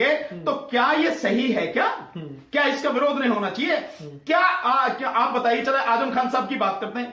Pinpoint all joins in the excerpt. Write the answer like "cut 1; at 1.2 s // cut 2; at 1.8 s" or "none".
none